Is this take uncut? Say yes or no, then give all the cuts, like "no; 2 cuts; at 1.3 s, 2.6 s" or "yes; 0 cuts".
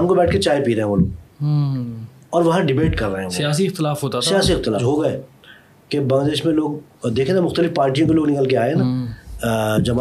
no; 1 cut; at 4.8 s